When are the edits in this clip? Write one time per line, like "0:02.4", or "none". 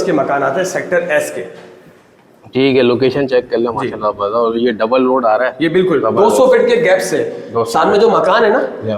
none